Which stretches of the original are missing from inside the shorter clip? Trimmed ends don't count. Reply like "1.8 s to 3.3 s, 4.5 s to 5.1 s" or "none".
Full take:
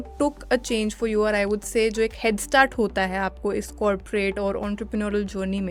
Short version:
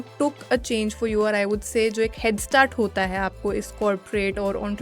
none